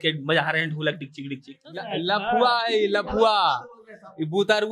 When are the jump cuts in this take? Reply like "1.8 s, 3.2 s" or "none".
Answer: 1.7 s